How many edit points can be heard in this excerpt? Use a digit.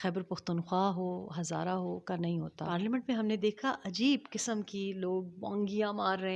1